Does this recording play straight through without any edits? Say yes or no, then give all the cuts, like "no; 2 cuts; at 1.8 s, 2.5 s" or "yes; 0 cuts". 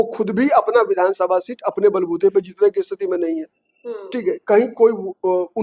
yes; 0 cuts